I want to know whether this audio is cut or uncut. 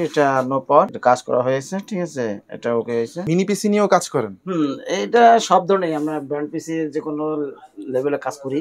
uncut